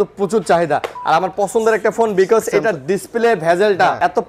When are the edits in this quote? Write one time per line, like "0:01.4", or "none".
none